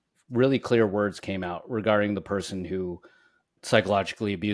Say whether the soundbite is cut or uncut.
cut